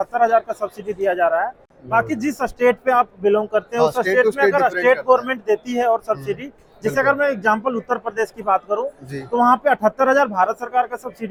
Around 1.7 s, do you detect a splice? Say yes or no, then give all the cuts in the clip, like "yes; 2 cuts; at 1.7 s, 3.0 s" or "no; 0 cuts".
no; 0 cuts